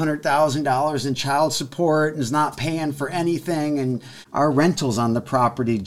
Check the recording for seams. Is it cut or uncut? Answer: cut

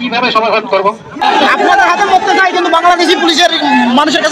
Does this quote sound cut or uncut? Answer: cut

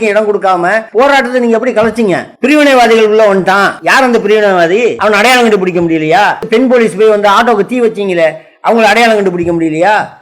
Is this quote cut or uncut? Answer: cut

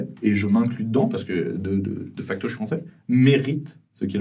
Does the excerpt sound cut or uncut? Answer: uncut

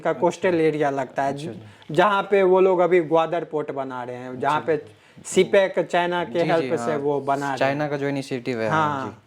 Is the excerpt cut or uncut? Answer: uncut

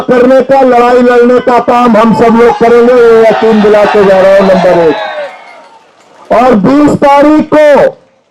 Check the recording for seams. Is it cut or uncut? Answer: uncut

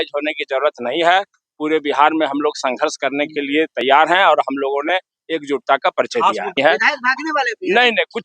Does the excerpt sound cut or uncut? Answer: cut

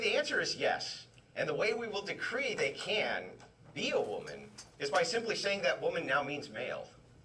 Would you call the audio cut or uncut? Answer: uncut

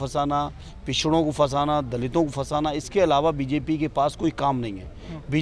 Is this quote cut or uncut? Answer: uncut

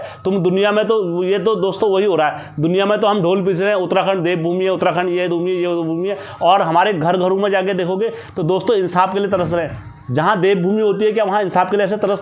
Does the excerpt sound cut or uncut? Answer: uncut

